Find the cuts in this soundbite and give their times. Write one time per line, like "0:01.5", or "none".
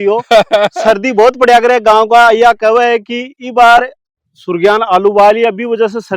none